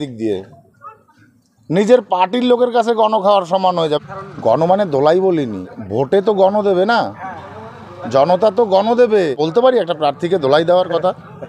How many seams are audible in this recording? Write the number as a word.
three